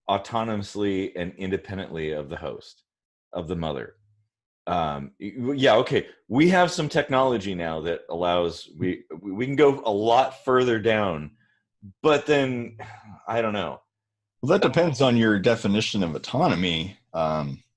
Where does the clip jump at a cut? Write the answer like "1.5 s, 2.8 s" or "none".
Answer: none